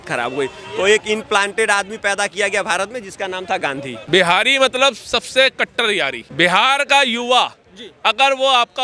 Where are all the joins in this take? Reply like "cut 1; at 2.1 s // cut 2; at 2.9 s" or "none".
cut 1; at 3.9 s // cut 2; at 6.2 s